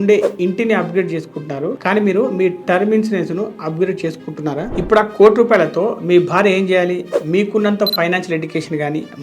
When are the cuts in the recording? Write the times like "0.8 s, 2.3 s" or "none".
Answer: 4.7 s